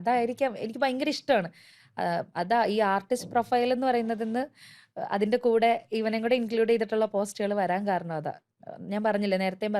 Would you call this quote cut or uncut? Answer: uncut